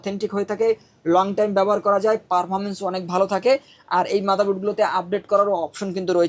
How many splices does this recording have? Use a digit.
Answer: 0